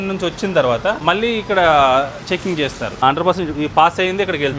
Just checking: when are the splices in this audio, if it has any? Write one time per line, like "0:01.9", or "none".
0:01.0
0:03.0